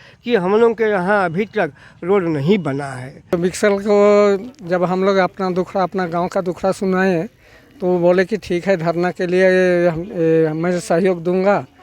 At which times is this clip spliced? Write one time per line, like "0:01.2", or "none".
0:03.4